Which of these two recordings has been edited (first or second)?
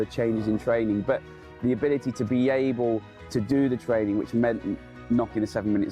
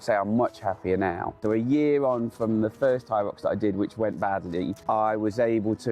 second